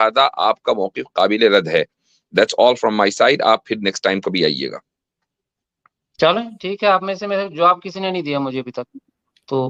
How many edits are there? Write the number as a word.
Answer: zero